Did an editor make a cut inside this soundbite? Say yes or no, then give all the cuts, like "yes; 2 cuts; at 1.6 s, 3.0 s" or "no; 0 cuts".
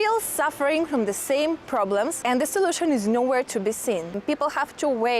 yes; 2 cuts; at 2.2 s, 4.2 s